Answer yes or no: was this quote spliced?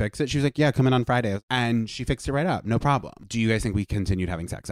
yes